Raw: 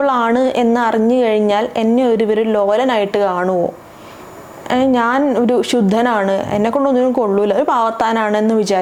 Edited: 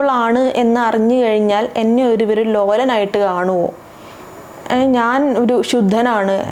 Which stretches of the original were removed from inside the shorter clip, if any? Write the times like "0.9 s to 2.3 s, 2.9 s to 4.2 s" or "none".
none